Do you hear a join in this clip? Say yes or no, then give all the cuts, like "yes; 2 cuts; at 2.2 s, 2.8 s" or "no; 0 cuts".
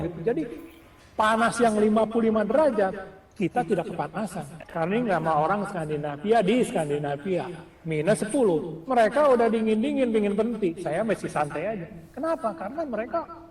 yes; 1 cut; at 4.6 s